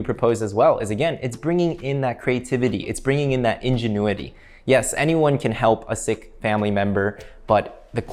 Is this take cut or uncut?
uncut